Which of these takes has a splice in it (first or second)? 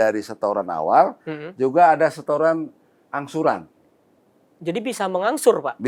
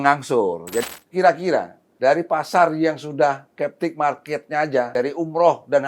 second